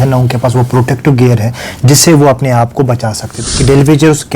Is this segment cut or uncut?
cut